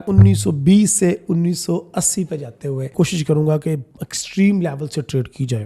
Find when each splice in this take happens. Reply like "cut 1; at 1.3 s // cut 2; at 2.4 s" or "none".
cut 1; at 2.9 s